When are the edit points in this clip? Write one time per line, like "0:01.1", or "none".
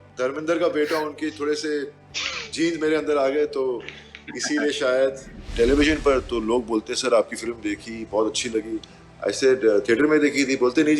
0:05.4